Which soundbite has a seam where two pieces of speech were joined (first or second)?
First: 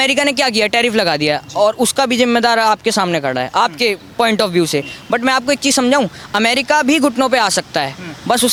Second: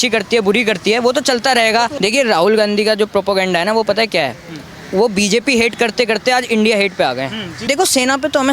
second